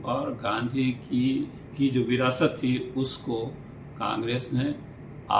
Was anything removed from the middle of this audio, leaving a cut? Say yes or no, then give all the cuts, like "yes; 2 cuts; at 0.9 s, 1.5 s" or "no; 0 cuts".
yes; 1 cut; at 1.6 s